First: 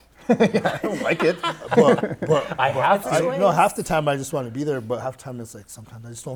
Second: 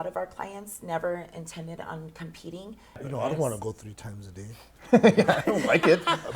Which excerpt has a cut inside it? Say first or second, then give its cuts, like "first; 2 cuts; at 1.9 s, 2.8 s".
second; 1 cut; at 3.0 s